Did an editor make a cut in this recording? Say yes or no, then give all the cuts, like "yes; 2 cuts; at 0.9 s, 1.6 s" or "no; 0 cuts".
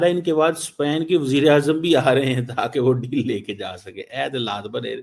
no; 0 cuts